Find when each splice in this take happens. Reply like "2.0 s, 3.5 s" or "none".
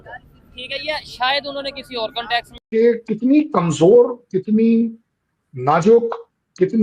2.6 s